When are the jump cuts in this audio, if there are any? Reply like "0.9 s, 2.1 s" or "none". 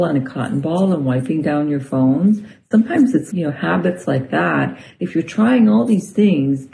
3.3 s